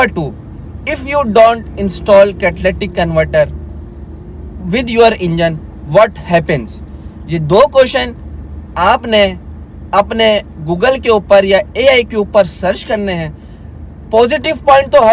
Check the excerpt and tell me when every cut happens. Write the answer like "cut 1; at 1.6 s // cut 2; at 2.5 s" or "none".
none